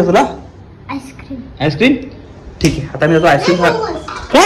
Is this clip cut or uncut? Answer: uncut